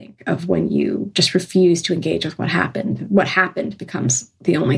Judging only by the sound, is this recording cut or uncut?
uncut